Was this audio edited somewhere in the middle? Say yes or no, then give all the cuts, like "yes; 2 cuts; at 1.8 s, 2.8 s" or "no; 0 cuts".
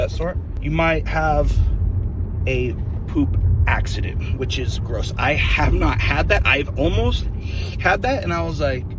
no; 0 cuts